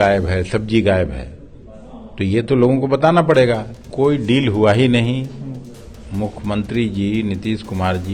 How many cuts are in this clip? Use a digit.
1